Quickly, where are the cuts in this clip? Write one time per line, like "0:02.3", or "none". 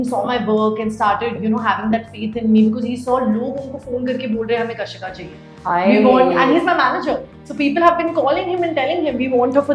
none